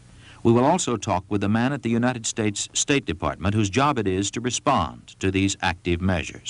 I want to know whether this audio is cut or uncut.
uncut